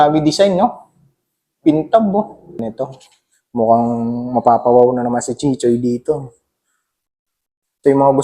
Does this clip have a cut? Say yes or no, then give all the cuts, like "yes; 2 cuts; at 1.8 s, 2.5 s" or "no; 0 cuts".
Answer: yes; 1 cut; at 2.6 s